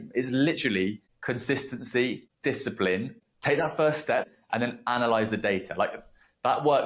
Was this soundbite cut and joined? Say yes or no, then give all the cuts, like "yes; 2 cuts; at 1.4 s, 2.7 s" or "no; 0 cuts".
yes; 4 cuts; at 1.1 s, 2.3 s, 3.2 s, 4.2 s